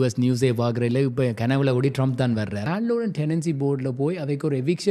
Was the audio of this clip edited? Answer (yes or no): yes